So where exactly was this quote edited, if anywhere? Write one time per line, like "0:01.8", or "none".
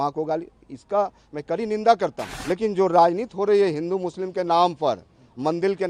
0:02.3